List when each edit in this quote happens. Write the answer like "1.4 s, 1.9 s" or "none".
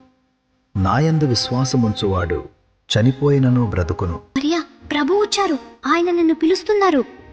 4.4 s